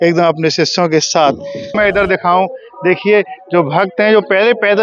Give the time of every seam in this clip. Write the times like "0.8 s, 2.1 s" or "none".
1.8 s